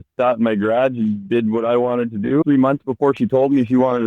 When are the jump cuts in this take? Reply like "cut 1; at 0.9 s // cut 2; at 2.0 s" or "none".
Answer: cut 1; at 2.4 s